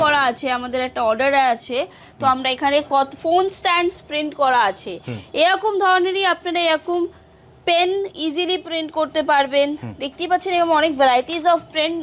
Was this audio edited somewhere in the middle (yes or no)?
no